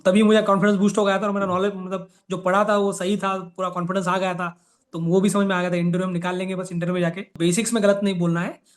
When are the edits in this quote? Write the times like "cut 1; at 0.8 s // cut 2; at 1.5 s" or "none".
cut 1; at 7.3 s